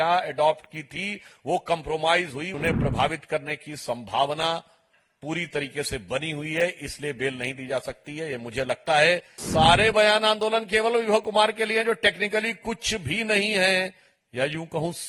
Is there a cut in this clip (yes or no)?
yes